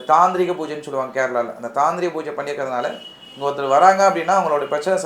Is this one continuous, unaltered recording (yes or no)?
yes